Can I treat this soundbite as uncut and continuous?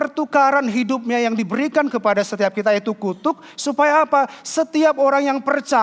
yes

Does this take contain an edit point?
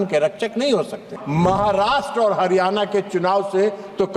yes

